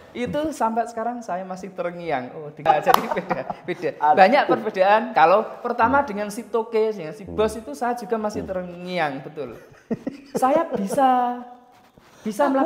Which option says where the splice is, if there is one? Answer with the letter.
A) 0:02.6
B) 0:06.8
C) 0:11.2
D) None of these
A